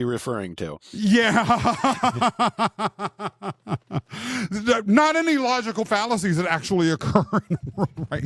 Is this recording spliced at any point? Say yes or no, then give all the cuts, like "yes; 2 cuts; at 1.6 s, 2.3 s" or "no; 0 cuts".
no; 0 cuts